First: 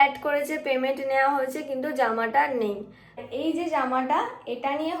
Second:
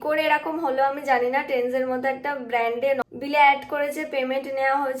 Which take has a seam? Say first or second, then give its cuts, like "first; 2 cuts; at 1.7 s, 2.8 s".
first; 1 cut; at 3.2 s